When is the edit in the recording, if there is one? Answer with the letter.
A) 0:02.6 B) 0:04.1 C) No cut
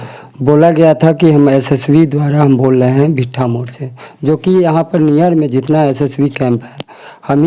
C